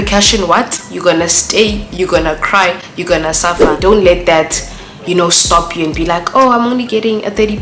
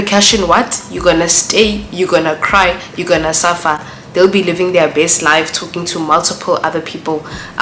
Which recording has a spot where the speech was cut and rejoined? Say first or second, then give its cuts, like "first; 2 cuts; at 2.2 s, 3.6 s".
first; 1 cut; at 3.7 s